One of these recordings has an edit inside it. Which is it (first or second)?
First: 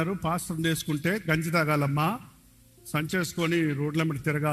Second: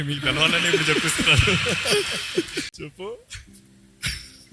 second